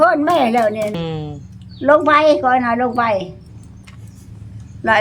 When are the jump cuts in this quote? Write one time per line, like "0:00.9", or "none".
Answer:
0:01.1